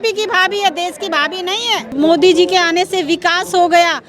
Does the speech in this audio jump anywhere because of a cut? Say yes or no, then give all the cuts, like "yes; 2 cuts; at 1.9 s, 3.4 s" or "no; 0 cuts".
yes; 1 cut; at 1.9 s